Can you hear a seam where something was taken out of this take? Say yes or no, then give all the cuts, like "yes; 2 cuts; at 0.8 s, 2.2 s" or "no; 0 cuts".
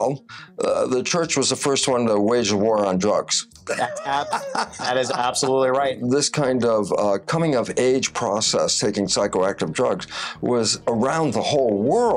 yes; 1 cut; at 6.0 s